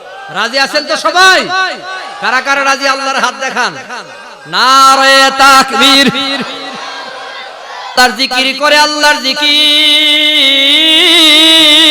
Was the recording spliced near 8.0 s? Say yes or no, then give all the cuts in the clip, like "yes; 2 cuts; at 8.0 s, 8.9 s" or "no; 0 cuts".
yes; 1 cut; at 8.0 s